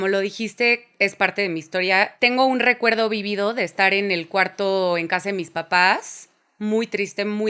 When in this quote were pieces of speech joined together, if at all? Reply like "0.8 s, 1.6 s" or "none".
2.1 s